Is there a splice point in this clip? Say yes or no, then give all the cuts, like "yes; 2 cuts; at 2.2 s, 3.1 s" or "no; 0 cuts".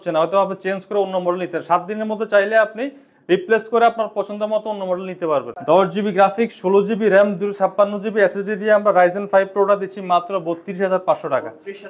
yes; 1 cut; at 5.5 s